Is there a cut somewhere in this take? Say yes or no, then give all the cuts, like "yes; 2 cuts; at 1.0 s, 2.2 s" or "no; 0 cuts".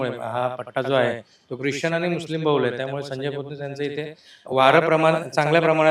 no; 0 cuts